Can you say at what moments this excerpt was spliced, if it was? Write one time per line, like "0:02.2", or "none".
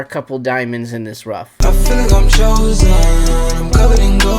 0:01.5